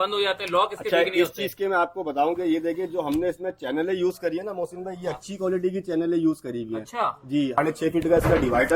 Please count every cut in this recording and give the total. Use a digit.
1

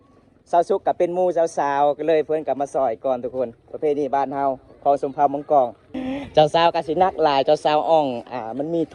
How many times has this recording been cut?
1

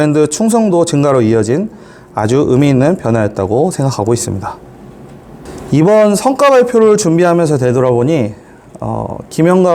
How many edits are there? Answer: 1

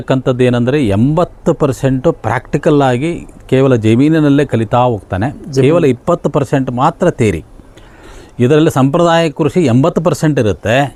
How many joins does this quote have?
0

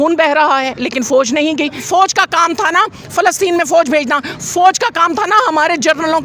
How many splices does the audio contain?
1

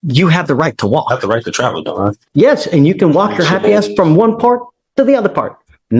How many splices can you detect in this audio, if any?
1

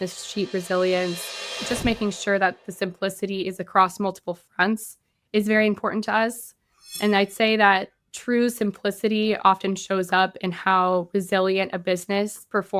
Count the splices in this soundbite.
1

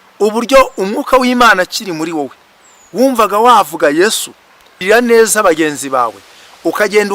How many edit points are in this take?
1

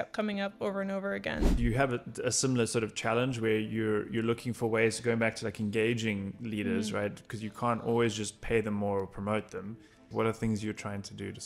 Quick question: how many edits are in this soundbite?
2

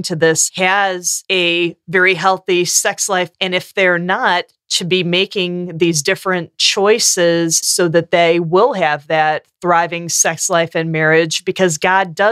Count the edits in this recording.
2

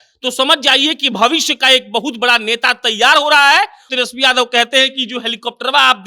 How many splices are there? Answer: 1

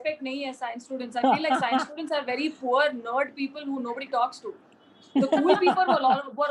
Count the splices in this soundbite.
0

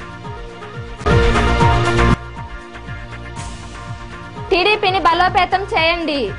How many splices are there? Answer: 0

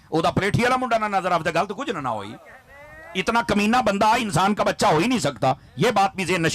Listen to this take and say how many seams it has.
0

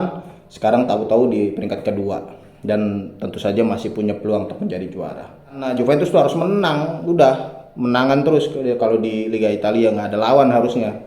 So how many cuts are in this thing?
1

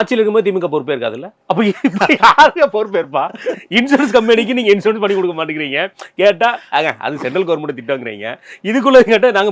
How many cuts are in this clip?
1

